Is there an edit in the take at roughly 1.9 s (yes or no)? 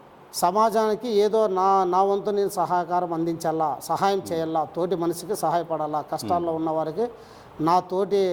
no